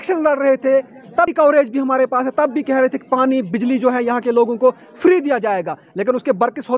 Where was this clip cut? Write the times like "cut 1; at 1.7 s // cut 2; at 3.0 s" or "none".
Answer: cut 1; at 1.3 s